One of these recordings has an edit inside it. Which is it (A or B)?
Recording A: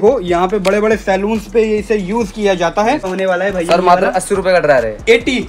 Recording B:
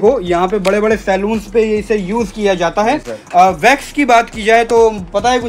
A